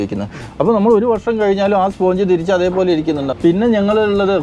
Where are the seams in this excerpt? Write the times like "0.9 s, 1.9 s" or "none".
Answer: 3.3 s